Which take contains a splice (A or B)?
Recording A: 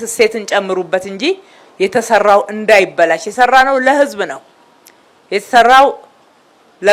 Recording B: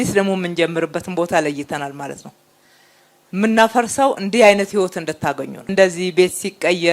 B